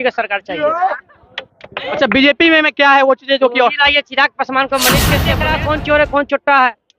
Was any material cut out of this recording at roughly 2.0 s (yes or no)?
no